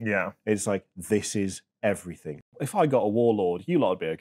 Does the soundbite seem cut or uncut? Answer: cut